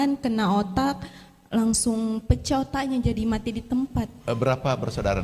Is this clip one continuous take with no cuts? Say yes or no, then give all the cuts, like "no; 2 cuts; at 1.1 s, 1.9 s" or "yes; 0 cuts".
yes; 0 cuts